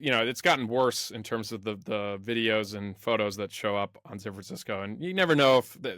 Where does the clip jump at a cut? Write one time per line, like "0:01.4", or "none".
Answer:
none